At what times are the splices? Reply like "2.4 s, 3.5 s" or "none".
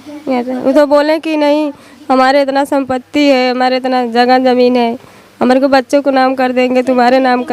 none